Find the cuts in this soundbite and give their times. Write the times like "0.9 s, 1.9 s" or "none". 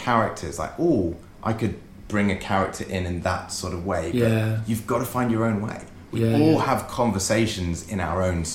none